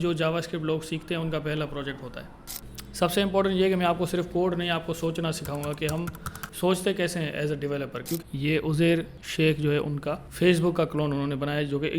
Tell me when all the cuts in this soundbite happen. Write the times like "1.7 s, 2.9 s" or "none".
2.3 s, 8.1 s, 9.2 s, 10.3 s